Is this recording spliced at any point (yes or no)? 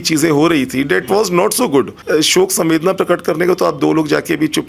yes